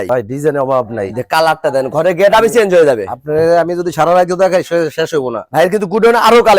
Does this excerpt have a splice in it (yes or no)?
no